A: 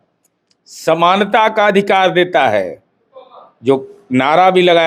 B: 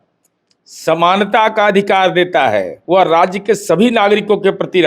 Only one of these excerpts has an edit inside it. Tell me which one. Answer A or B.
B